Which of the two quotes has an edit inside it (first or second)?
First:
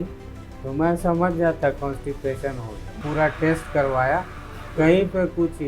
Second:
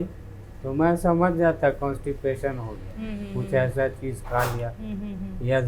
first